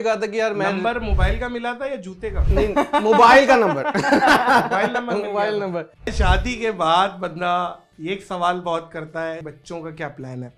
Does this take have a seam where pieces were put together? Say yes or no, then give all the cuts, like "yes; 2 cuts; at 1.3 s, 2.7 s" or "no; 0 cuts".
yes; 2 cuts; at 6.1 s, 9.4 s